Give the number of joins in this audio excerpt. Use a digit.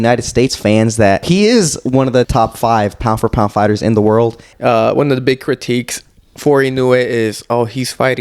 3